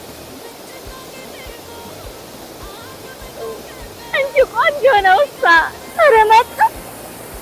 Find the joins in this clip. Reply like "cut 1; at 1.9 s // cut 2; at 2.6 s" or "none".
cut 1; at 5.8 s